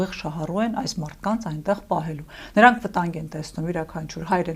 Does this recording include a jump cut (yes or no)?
no